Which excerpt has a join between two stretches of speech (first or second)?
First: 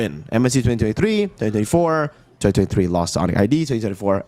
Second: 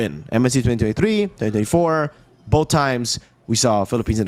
first